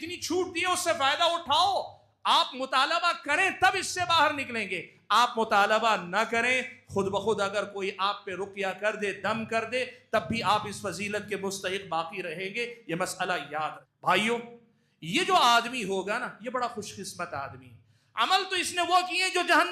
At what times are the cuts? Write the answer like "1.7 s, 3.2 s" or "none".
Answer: 13.9 s